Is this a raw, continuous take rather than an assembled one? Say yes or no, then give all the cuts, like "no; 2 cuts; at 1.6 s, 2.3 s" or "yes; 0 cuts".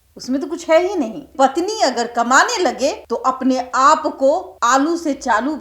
no; 3 cuts; at 1.3 s, 3.1 s, 4.5 s